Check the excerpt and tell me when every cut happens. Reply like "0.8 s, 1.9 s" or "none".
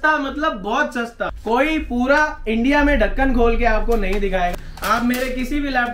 1.4 s, 4.5 s